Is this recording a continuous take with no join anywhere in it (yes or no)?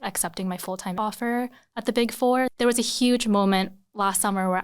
no